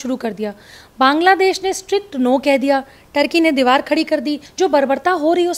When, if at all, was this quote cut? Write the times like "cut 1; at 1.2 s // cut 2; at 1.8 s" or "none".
cut 1; at 4.4 s